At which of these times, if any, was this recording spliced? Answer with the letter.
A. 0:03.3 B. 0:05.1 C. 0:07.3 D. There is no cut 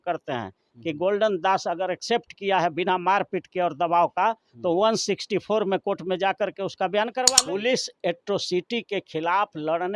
C